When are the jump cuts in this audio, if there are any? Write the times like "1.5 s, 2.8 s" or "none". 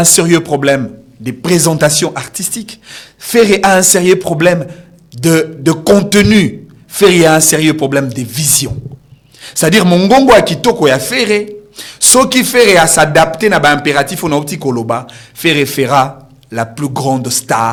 none